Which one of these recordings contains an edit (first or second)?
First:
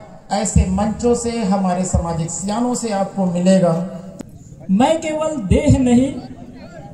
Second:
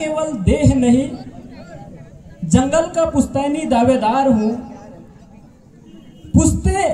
first